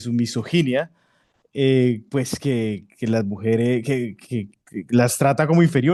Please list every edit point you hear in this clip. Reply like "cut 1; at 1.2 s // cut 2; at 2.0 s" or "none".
none